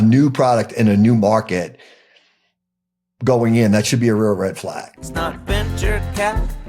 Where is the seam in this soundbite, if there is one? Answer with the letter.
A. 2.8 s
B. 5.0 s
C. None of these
B